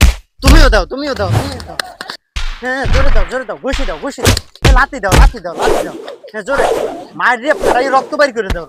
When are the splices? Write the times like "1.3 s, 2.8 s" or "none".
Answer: none